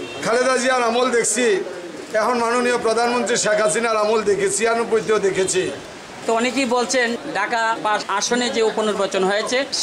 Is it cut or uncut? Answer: cut